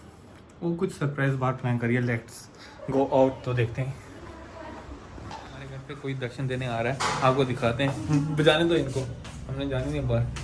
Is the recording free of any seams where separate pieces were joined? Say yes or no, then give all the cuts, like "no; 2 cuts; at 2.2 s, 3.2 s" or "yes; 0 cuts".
no; 1 cut; at 5.9 s